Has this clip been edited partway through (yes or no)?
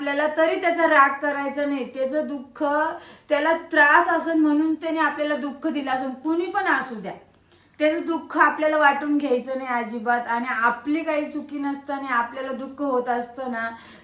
no